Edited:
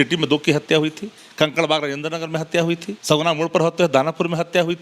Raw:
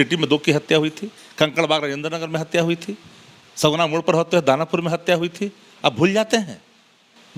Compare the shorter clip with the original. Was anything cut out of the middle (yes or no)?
yes